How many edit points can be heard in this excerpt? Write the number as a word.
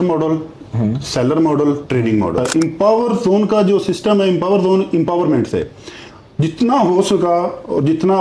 one